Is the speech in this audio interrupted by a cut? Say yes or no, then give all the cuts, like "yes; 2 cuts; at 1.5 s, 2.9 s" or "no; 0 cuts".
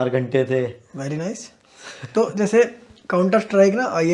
no; 0 cuts